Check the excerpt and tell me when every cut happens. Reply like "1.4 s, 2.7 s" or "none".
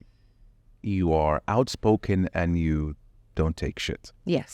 none